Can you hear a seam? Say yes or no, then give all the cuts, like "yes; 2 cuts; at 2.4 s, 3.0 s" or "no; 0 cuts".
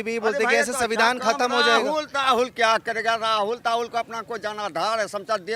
no; 0 cuts